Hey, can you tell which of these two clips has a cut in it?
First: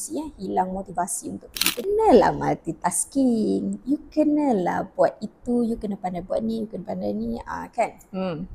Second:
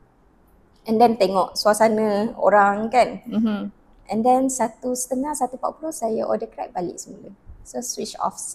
first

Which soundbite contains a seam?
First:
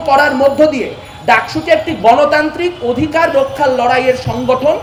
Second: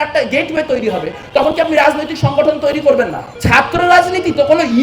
second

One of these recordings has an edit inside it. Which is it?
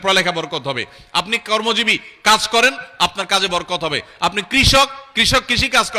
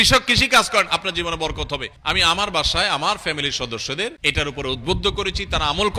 second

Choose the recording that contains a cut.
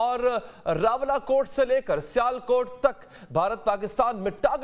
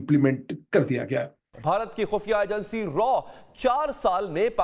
second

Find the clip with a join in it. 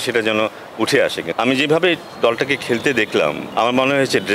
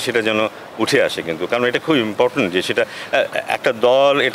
first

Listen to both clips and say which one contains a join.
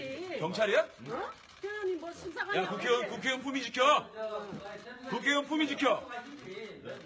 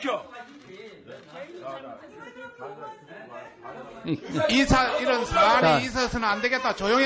first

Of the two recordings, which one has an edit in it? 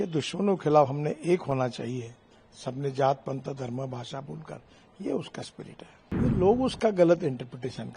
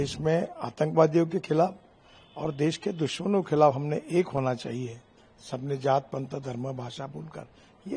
first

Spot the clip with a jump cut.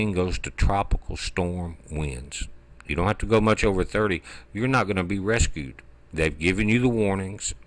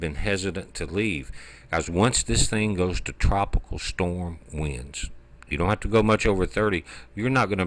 second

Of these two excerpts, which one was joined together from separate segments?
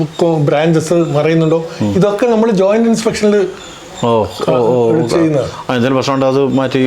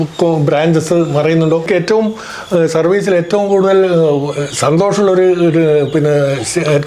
second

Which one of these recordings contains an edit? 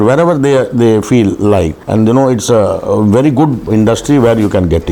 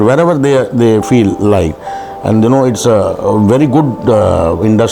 first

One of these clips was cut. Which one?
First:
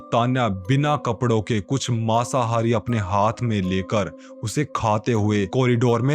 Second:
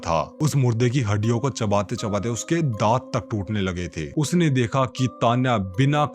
second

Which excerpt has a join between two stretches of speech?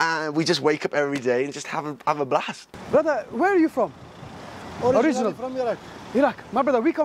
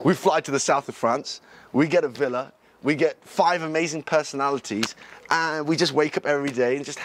first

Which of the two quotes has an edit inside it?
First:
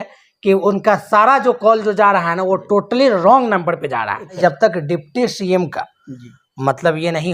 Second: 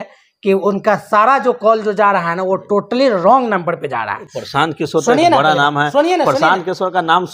first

